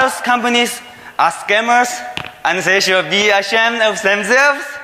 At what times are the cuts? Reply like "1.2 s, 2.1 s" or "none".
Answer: none